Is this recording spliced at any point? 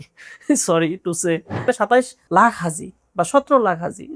yes; 1 cut; at 1.7 s

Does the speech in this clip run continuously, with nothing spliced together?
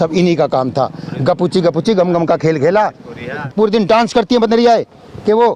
no; 1 cut; at 3.4 s

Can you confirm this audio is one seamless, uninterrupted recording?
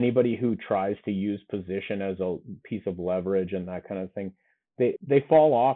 yes; 0 cuts

